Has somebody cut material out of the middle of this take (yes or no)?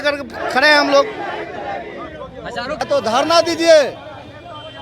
yes